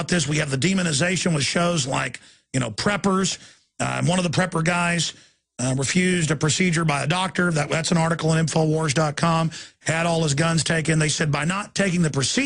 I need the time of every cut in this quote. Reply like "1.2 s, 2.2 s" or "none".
4.2 s